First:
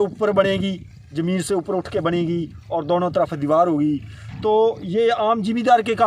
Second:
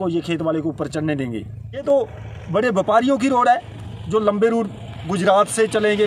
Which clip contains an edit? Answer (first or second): second